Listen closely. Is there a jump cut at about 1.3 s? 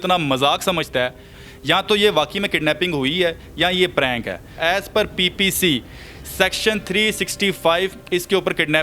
yes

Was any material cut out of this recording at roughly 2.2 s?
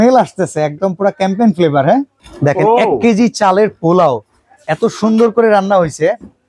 yes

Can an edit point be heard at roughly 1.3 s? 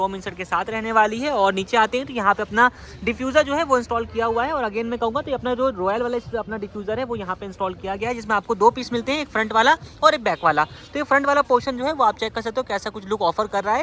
no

